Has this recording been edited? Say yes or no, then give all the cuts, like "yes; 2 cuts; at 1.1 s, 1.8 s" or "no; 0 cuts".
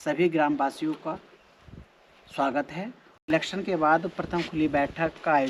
yes; 1 cut; at 3.1 s